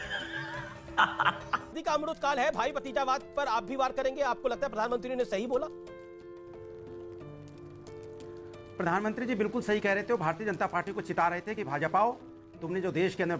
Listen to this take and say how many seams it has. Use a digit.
1